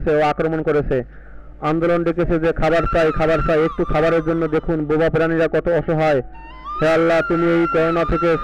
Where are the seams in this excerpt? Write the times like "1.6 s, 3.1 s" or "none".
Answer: none

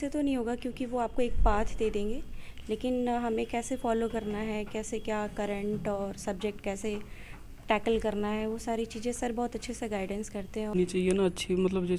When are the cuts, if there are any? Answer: 10.7 s

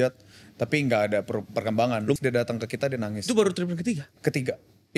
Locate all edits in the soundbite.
2.2 s

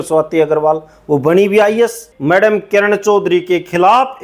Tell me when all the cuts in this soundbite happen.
2.1 s

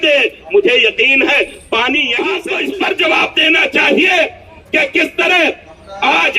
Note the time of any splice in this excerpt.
2.5 s

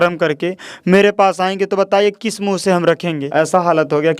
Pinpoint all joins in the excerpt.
3.3 s

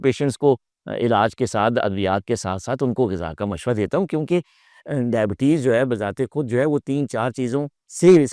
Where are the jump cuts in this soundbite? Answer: none

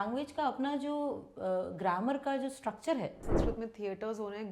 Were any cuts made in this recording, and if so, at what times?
3.3 s

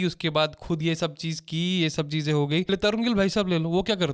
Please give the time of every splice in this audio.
2.7 s

